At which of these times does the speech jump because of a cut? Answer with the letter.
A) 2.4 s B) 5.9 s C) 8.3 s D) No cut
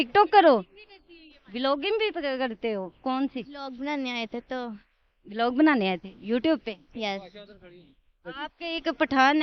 C